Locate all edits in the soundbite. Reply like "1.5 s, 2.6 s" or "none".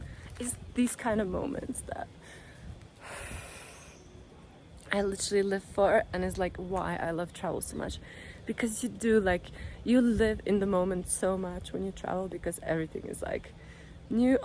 none